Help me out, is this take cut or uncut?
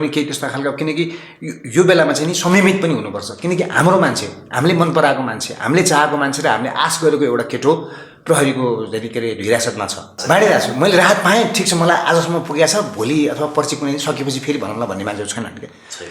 cut